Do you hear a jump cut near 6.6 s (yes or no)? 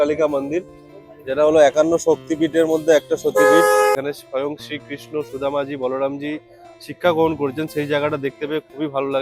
no